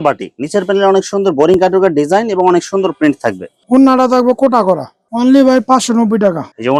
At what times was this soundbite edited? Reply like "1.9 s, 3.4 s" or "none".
none